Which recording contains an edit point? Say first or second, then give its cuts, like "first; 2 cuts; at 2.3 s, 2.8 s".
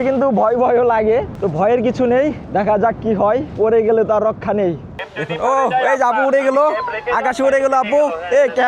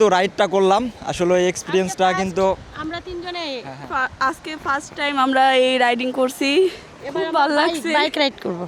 first; 4 cuts; at 1.3 s, 2.4 s, 3.5 s, 4.9 s